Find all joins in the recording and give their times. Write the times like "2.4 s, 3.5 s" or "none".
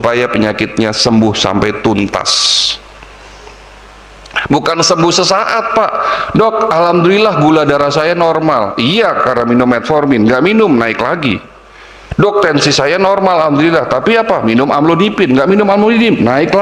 none